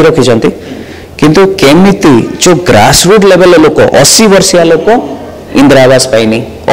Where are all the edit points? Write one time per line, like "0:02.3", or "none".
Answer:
none